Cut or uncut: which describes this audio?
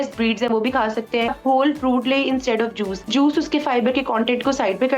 cut